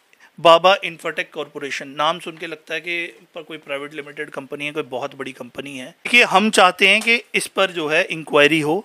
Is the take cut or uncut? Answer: cut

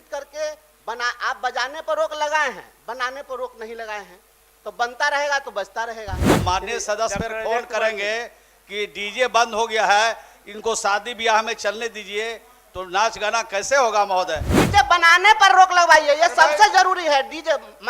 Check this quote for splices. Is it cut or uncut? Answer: cut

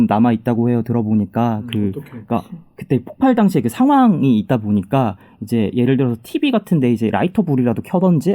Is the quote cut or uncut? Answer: uncut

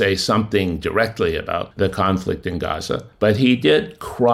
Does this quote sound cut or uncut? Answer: cut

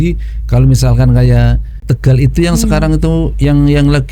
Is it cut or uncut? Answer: cut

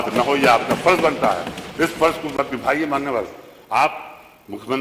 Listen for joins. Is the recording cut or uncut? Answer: uncut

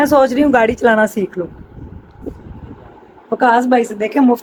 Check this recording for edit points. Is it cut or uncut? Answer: uncut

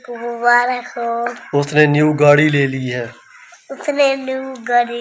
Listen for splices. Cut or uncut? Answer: uncut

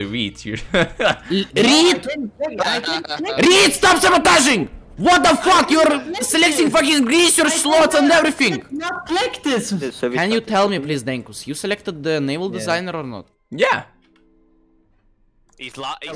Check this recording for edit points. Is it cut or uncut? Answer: cut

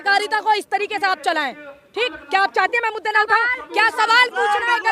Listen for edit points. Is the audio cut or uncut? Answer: uncut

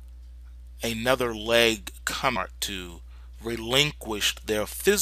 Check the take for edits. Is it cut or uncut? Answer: uncut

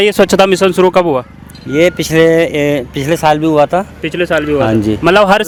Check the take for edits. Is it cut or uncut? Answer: uncut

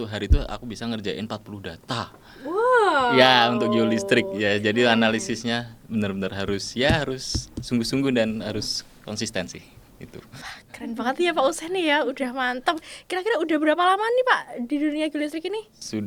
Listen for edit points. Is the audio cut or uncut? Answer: uncut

